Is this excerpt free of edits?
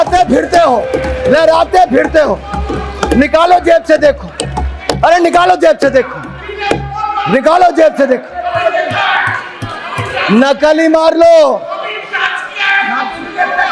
yes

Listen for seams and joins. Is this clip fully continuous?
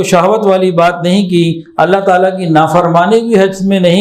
yes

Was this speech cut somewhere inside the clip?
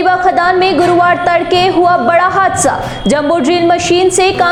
no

